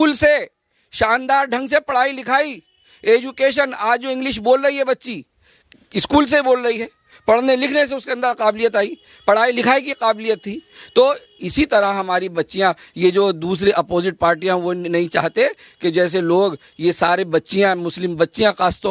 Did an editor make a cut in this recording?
no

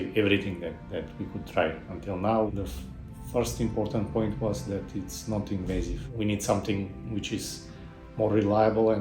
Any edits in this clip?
yes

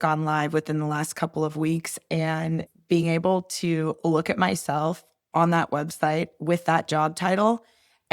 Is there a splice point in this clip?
yes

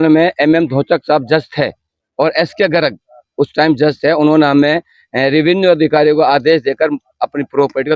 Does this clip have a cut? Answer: no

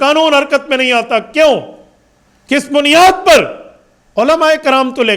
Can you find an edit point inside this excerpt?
no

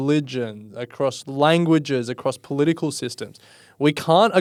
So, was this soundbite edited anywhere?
no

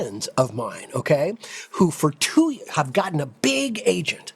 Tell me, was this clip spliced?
no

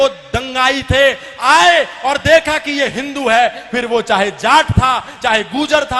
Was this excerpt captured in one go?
yes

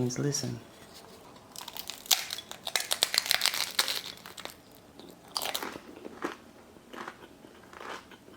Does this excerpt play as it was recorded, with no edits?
no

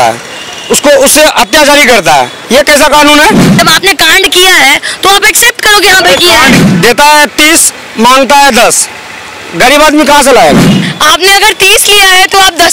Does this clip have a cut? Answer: yes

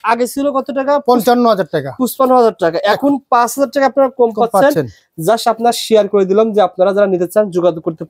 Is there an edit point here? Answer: no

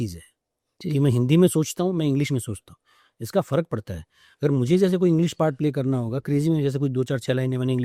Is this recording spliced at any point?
no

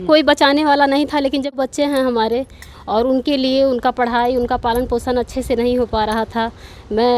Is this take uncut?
no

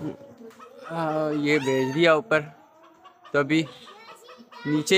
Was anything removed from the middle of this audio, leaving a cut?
no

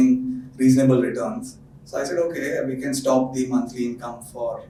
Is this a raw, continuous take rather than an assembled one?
yes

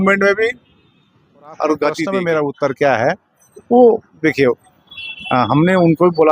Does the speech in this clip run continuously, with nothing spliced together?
no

